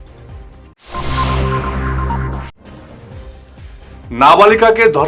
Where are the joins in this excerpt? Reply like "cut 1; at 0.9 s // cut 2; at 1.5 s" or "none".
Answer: cut 1; at 3.5 s